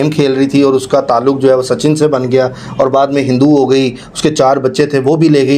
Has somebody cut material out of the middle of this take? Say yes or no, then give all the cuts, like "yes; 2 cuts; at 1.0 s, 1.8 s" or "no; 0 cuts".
no; 0 cuts